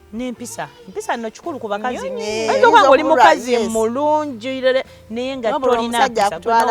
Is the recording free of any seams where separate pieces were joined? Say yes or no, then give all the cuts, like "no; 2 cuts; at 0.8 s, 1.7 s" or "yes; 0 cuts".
yes; 0 cuts